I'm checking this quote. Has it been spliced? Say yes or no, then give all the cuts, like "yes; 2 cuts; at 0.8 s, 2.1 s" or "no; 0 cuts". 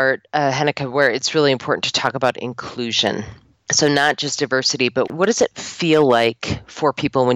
no; 0 cuts